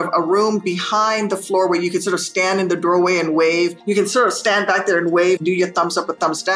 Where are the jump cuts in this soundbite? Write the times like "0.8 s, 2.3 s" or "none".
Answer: 3.8 s, 5.4 s